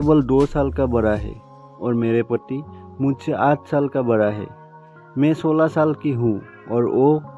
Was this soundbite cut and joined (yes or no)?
no